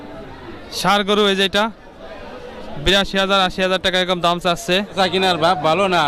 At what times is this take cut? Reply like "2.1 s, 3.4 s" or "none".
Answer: 4.9 s